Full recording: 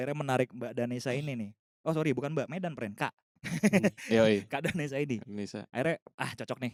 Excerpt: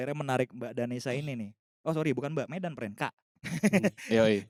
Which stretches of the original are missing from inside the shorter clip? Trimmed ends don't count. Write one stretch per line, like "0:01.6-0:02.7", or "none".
none